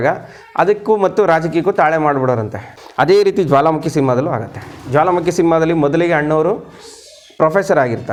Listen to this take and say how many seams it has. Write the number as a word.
zero